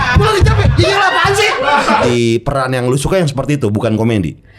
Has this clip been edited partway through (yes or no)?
yes